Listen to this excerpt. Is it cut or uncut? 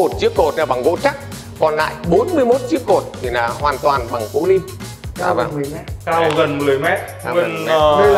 uncut